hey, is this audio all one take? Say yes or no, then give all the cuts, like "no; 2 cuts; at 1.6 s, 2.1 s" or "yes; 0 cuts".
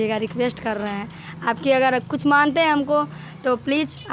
yes; 0 cuts